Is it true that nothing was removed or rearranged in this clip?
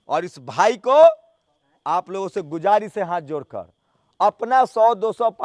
yes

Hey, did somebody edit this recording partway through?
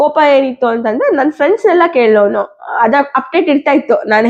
no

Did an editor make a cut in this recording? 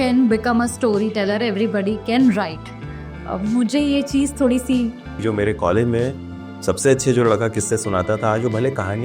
yes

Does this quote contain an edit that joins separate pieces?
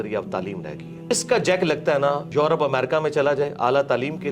yes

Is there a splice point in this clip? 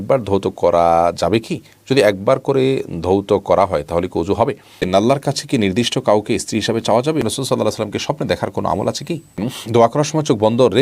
yes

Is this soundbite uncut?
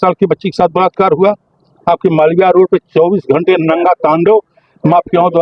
yes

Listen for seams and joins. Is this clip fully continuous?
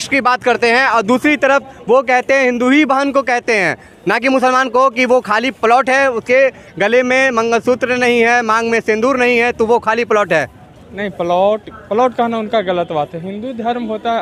yes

